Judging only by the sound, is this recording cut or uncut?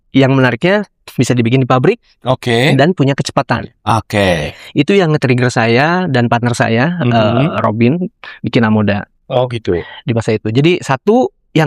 uncut